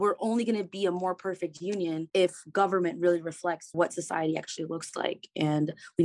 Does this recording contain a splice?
yes; 2 cuts; at 2.0 s, 3.6 s

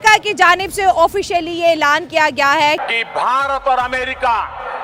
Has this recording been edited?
no; 0 cuts

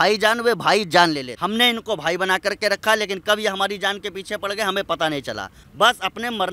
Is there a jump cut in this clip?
yes; 2 cuts; at 1.3 s, 5.6 s

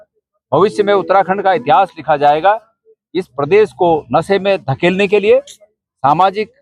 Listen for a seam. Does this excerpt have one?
no; 0 cuts

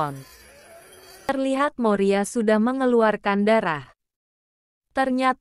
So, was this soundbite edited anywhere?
yes; 1 cut; at 1.3 s

